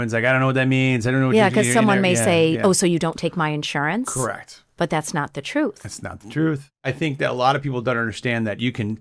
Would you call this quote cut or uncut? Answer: cut